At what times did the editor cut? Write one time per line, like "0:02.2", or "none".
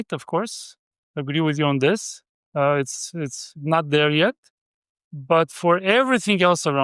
none